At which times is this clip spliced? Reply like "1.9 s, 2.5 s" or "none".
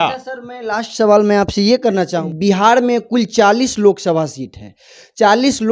2.3 s